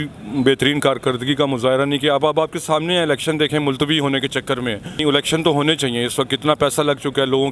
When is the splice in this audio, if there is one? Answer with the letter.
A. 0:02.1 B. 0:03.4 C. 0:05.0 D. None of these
C